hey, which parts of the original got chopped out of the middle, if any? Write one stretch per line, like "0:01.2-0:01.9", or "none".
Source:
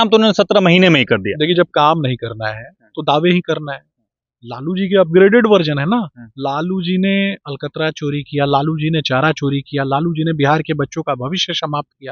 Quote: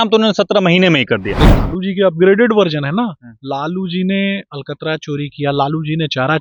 0:01.5-0:04.4